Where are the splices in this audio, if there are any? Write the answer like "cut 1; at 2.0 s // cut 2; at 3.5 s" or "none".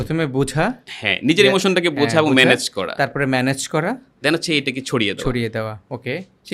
none